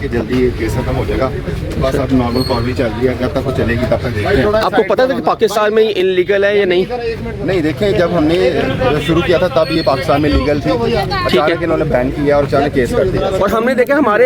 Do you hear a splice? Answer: no; 0 cuts

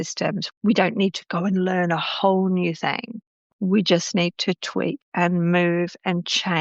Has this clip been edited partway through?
yes; 1 cut; at 3.4 s

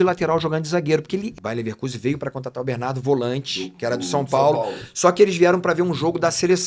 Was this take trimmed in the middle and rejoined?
yes; 1 cut; at 1.3 s

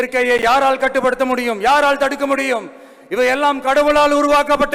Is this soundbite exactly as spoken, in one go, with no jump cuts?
yes; 0 cuts

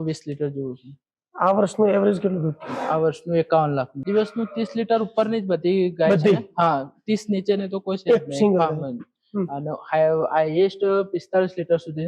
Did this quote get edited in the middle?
yes; 1 cut; at 4.0 s

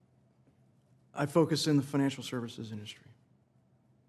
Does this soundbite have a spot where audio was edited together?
no; 0 cuts

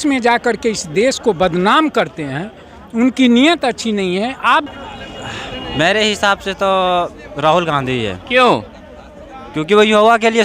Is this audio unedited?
no; 1 cut; at 4.7 s

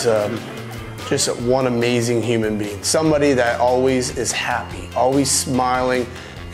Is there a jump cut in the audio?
no; 0 cuts

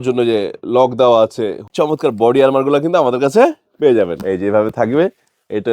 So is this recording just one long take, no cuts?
no; 1 cut; at 1.7 s

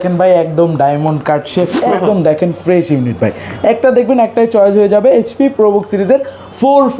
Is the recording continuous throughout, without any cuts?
no; 1 cut; at 1.8 s

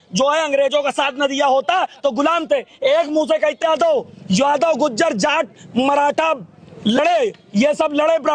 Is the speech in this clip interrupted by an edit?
yes; 1 cut; at 3.6 s

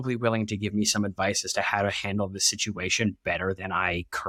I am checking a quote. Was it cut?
no; 0 cuts

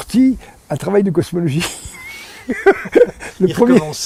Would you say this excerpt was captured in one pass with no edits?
yes; 0 cuts

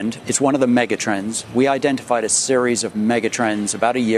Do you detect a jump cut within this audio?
no; 0 cuts

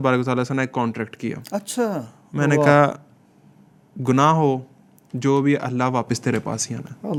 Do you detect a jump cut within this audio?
no; 0 cuts

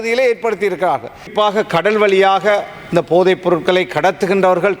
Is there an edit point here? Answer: yes; 1 cut; at 1.3 s

